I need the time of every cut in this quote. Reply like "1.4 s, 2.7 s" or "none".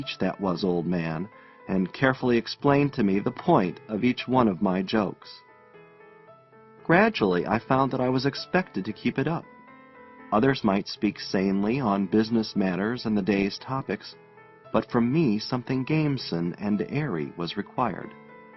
none